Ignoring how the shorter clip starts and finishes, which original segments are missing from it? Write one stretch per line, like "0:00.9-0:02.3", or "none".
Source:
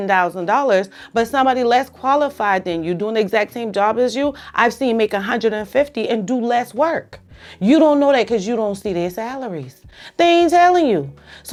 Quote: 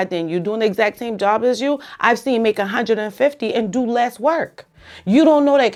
none